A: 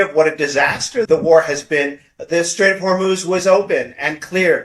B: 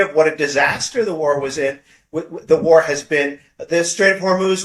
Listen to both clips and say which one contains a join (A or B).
A